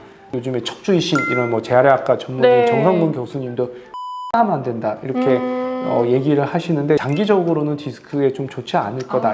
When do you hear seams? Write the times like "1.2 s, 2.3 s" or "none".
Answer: 7.0 s